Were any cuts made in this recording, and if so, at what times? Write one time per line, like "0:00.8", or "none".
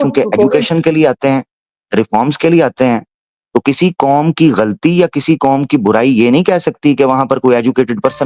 none